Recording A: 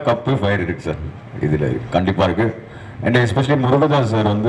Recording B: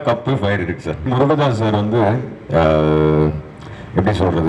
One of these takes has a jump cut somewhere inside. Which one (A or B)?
B